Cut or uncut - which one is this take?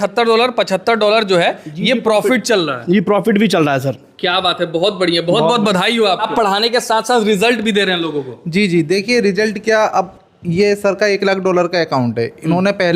cut